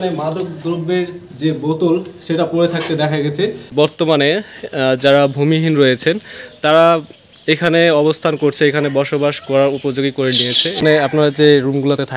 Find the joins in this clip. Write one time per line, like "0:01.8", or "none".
0:03.7
0:10.8